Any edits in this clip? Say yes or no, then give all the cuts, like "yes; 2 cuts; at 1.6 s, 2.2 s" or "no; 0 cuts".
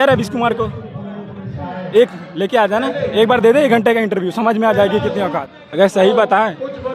yes; 1 cut; at 5.3 s